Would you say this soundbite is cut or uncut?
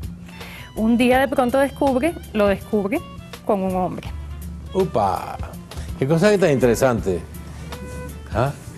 uncut